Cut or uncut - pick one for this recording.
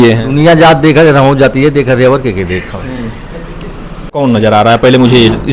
cut